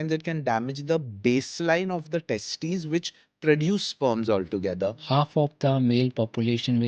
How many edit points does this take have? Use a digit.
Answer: 1